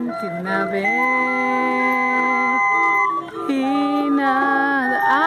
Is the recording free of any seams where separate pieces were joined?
yes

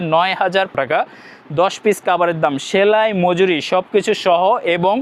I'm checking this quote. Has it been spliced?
no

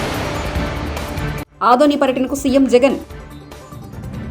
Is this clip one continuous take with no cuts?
no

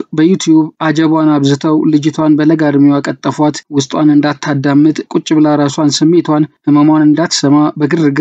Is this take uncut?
yes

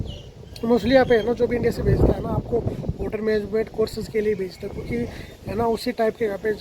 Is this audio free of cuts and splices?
yes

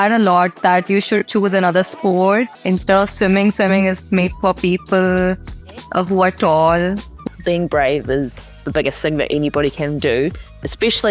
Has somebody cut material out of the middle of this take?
yes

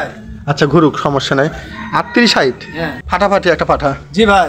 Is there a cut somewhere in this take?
yes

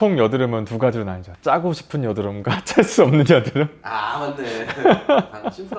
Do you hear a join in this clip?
no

